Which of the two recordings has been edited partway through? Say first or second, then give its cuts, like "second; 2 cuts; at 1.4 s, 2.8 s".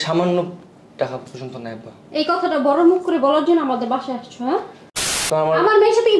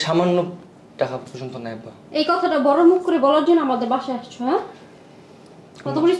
first; 1 cut; at 5.2 s